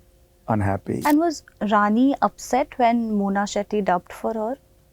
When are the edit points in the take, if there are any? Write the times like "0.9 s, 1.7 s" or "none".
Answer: 1.0 s